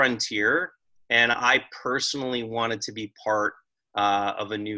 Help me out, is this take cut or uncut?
uncut